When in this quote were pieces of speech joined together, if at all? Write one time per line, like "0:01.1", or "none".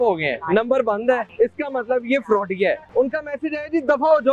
0:01.3
0:02.8